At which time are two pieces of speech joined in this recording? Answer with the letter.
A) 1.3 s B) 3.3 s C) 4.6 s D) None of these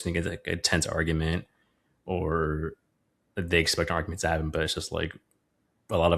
D